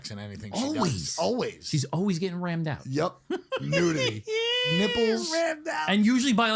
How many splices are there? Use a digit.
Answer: 0